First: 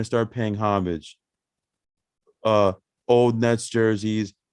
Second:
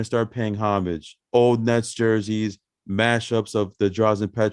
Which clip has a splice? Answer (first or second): second